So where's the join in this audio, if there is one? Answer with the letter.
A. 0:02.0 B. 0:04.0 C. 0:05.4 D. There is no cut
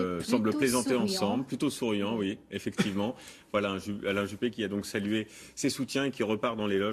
D